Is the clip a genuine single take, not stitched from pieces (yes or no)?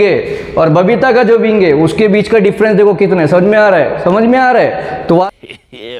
yes